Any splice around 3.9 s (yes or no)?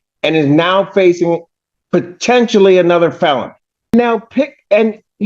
yes